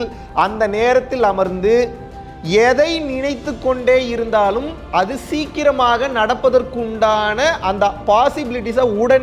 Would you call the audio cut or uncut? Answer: uncut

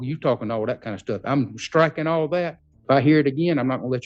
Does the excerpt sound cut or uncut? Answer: cut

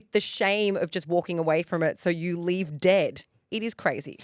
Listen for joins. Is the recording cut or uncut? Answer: uncut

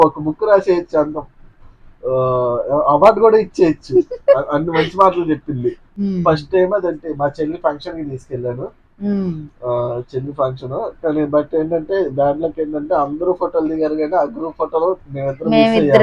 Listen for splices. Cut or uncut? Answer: cut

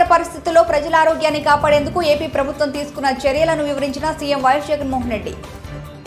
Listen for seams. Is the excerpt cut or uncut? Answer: uncut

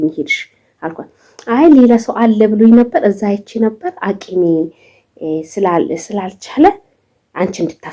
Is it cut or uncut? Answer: uncut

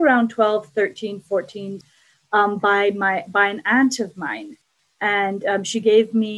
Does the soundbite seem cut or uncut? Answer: cut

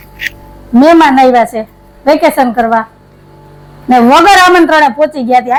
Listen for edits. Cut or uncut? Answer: uncut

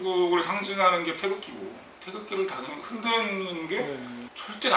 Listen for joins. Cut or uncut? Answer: uncut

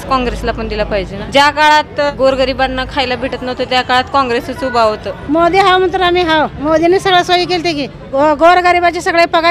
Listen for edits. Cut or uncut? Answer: cut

